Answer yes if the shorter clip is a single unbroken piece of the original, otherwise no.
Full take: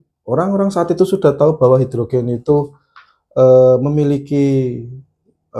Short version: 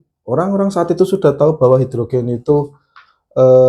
yes